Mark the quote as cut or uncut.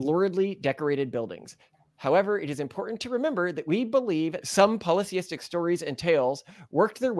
cut